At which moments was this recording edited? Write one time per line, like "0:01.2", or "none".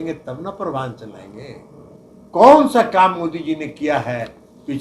0:02.0